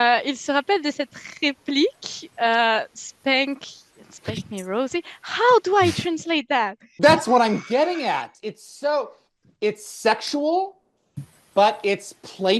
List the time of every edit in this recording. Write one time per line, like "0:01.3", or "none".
0:06.9